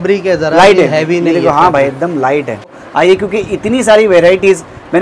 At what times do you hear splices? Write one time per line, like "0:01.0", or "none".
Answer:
0:02.8